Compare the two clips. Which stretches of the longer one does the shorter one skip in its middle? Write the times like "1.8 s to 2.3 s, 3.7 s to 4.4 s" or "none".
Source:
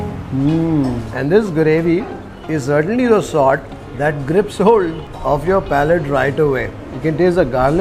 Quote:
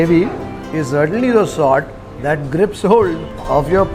none